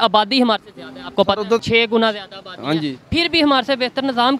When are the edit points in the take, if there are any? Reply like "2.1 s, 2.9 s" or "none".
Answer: 1.6 s